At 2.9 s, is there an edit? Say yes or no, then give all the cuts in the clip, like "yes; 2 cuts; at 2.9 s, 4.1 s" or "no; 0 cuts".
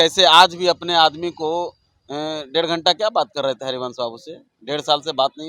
no; 0 cuts